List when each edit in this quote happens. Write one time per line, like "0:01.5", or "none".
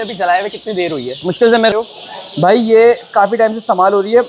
0:01.7